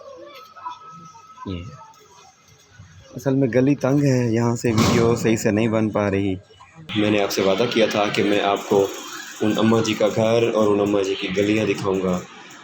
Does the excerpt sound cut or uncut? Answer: cut